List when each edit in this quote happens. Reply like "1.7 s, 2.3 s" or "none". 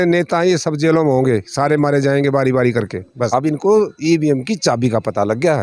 3.2 s